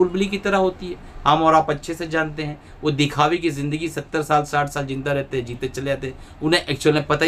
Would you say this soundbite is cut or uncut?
uncut